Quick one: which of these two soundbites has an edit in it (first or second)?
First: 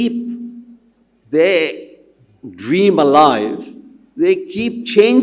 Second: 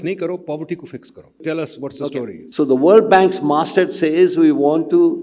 second